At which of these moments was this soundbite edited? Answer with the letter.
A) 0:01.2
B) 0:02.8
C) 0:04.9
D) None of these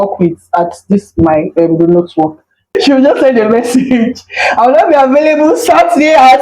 B